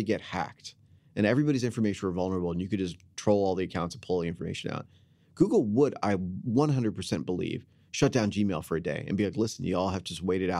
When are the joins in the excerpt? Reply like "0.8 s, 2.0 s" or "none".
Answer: none